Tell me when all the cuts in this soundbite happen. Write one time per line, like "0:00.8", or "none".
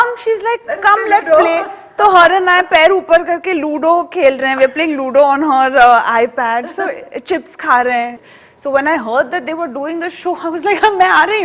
0:08.3